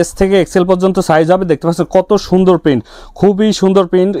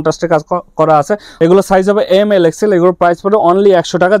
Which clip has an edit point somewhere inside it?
second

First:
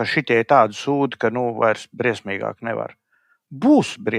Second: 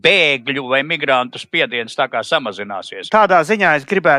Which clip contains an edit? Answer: second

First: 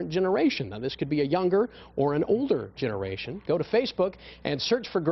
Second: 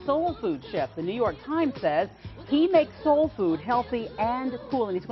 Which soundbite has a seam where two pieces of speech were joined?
second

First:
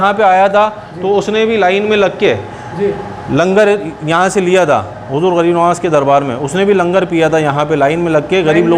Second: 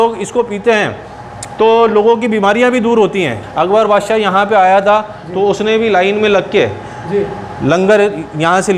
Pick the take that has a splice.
second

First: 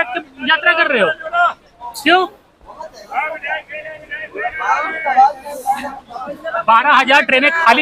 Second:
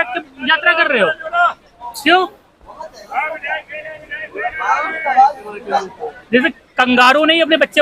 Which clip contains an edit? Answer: second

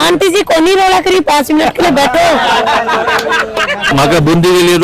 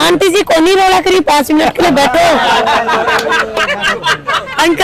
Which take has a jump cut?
first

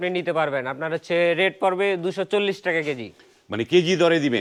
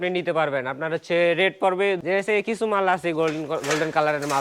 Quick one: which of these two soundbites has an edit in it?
second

